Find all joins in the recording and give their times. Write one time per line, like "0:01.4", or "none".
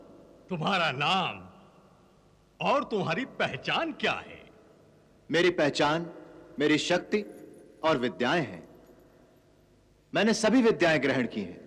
none